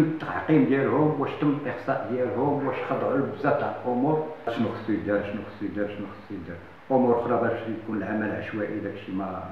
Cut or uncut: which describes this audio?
cut